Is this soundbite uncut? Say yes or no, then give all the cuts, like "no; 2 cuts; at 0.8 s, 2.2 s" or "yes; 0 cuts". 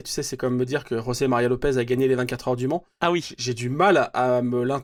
yes; 0 cuts